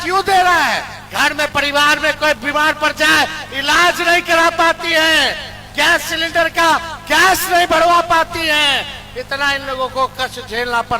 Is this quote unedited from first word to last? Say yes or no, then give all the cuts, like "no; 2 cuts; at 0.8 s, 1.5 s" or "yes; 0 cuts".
no; 1 cut; at 1.0 s